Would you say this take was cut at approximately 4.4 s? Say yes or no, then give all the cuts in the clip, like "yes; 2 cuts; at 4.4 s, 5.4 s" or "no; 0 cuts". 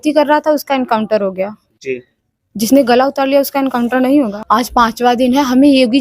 yes; 1 cut; at 4.4 s